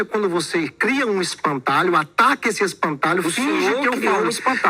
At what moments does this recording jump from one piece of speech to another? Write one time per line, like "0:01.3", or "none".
none